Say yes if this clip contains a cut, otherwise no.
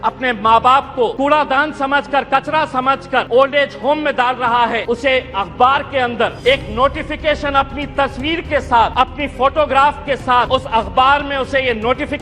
yes